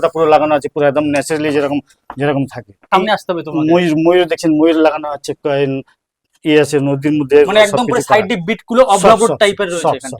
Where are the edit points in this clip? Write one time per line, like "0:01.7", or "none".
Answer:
0:02.9